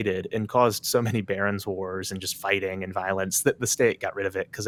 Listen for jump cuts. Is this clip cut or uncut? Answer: uncut